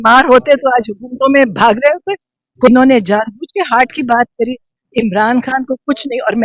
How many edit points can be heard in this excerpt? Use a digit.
1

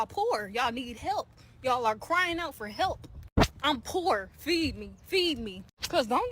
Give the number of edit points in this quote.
0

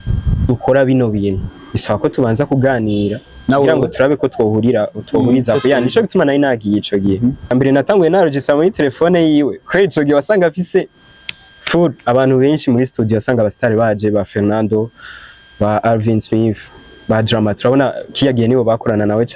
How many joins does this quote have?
1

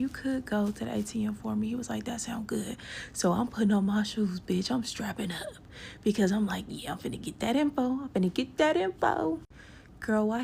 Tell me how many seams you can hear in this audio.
1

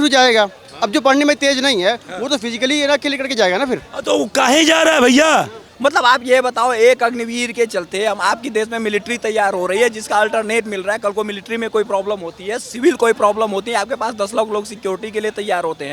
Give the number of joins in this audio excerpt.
1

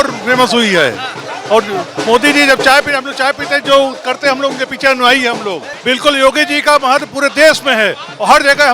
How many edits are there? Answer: 1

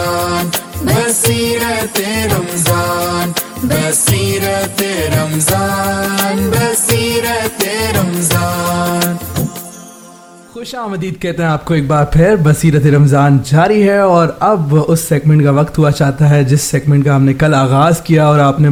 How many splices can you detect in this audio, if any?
0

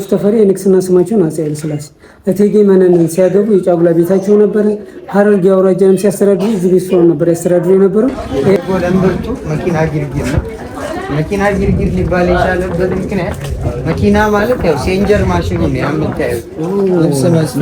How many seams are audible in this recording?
1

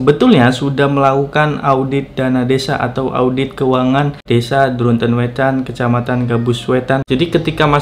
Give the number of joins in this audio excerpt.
2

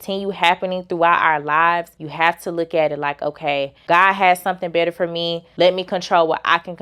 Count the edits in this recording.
3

